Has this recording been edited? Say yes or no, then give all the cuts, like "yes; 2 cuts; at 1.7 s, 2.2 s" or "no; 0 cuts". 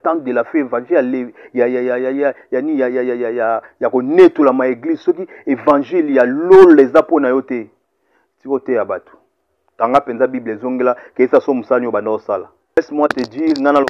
yes; 1 cut; at 12.8 s